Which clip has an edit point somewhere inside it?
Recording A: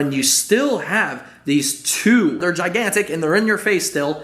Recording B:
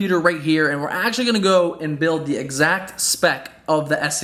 A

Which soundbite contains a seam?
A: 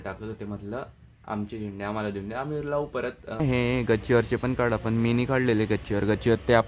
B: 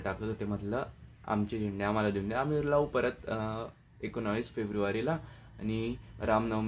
A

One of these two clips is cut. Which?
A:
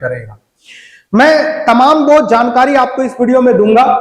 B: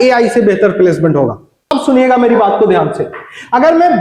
B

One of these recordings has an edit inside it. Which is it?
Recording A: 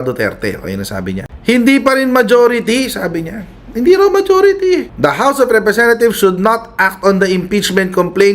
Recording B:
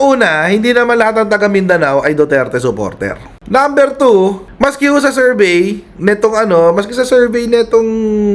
A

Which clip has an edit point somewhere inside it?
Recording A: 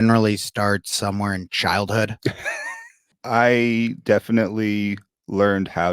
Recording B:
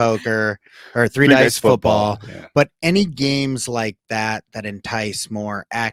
A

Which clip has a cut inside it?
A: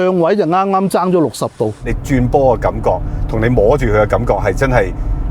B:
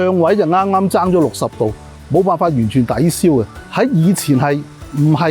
A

